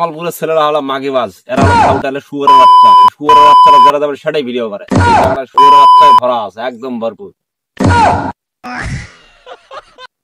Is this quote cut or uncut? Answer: uncut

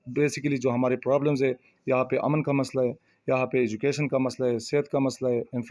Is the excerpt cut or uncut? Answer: uncut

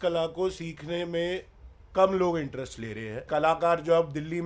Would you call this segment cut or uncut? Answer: cut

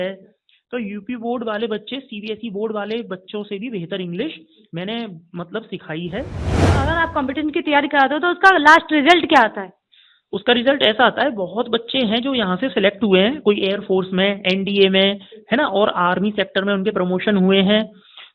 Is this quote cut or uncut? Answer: cut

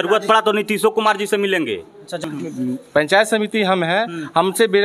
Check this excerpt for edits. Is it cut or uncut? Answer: cut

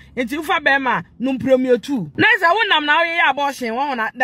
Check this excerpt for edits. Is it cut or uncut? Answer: cut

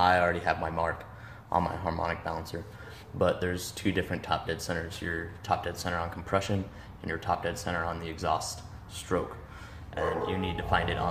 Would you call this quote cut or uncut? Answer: uncut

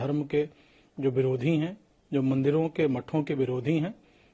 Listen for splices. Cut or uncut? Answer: uncut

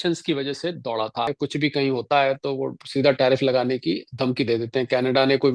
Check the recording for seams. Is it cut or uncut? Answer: cut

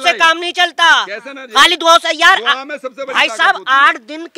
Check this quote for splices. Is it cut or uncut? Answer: uncut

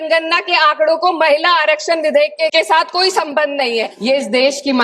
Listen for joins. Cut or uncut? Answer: cut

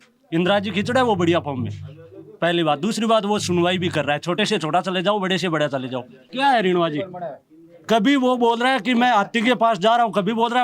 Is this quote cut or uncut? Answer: cut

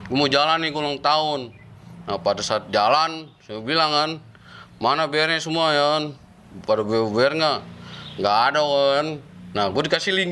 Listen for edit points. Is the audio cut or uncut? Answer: uncut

